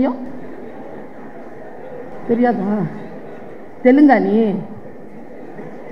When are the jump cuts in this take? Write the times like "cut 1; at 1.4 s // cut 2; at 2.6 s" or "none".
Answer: none

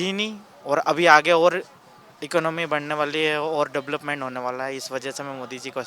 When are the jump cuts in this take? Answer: none

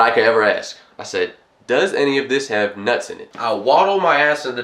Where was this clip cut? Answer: cut 1; at 3.3 s

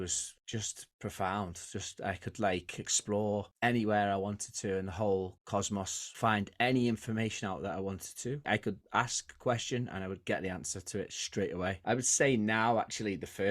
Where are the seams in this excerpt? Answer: cut 1; at 6.0 s // cut 2; at 8.5 s // cut 3; at 11.8 s

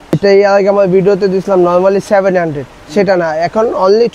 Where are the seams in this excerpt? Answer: none

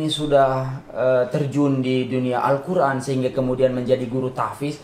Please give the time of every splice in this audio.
none

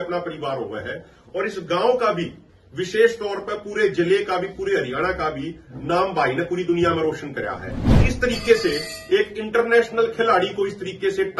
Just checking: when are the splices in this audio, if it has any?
cut 1; at 8.0 s

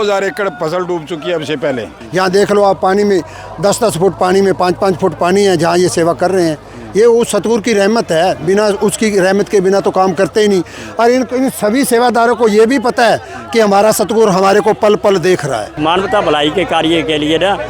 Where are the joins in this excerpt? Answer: cut 1; at 1.9 s // cut 2; at 15.8 s

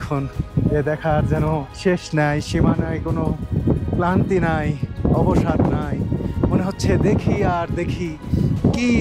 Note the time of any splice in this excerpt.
cut 1; at 1.7 s

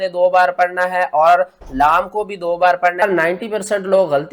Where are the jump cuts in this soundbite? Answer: cut 1; at 3.0 s

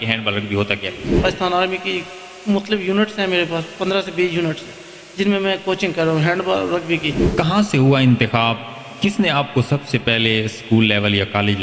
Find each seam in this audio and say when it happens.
cut 1; at 1.1 s // cut 2; at 7.2 s

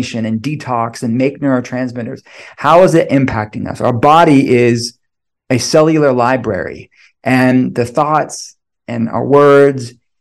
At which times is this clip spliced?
none

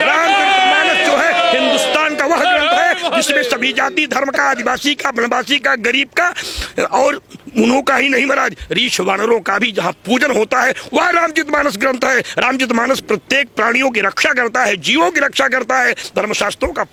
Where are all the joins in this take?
none

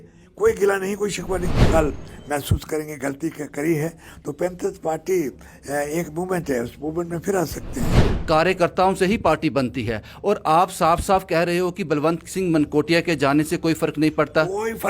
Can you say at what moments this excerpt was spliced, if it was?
cut 1; at 1.6 s // cut 2; at 8.0 s

